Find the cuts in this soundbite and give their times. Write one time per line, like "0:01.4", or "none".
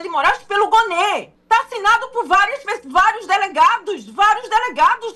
0:01.3